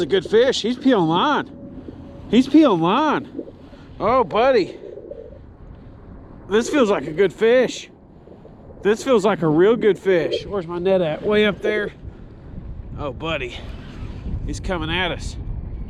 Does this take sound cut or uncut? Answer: uncut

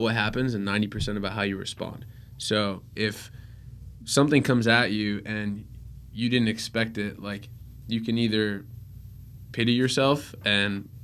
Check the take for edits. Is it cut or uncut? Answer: uncut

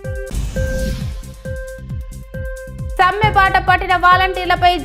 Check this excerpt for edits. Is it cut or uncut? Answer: uncut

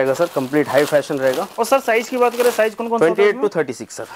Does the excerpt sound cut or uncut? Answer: uncut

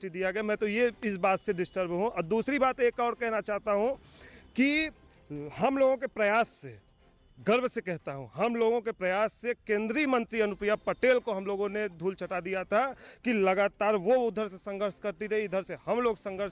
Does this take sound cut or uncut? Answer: uncut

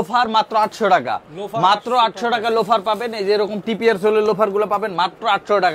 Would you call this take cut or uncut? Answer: uncut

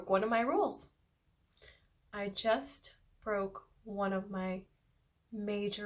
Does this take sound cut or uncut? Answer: uncut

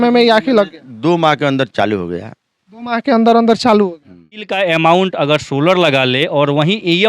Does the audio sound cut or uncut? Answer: cut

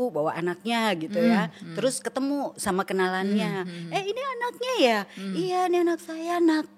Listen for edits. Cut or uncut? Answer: uncut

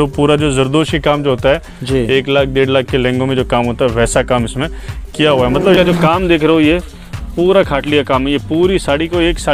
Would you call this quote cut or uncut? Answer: cut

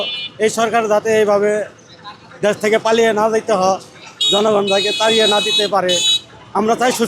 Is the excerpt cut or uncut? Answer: uncut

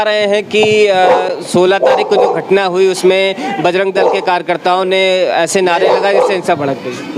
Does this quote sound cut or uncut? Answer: uncut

